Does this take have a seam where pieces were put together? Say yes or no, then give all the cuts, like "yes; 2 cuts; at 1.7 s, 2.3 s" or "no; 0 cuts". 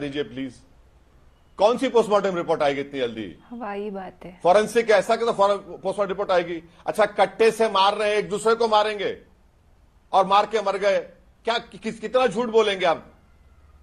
no; 0 cuts